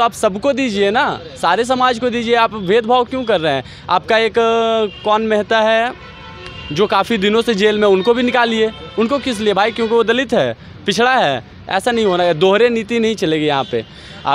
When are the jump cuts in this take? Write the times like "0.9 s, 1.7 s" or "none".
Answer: none